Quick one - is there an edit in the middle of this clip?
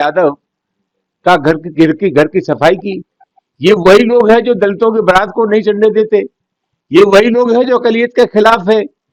no; 0 cuts

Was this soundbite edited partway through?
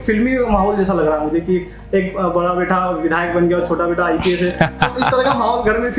no; 0 cuts

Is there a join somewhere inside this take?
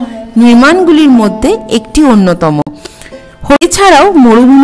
yes; 1 cut; at 3.6 s

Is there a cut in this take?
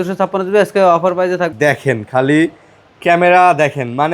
yes; 1 cut; at 1.5 s

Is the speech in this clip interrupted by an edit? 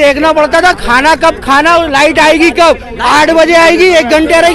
no; 0 cuts

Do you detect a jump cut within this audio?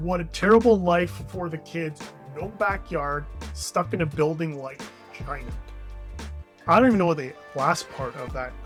no; 0 cuts

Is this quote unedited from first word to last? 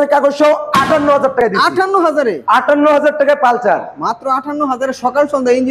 yes; 0 cuts

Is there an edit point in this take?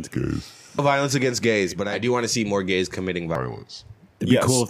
yes; 1 cut; at 1.9 s

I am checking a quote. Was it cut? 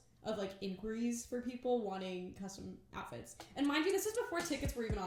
no; 0 cuts

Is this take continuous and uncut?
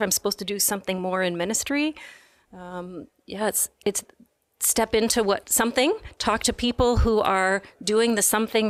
yes; 0 cuts

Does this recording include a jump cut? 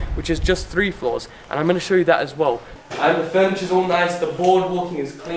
yes; 1 cut; at 2.7 s

